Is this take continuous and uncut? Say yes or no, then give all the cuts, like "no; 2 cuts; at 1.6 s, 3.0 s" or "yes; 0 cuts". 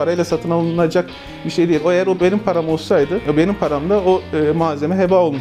yes; 0 cuts